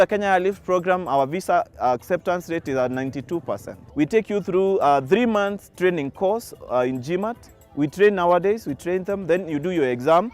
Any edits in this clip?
no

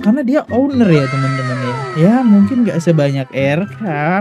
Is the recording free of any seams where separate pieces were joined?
yes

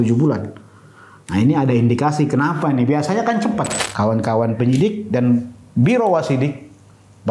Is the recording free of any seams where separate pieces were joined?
no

